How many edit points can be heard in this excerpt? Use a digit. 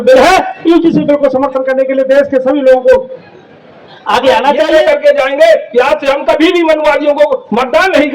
1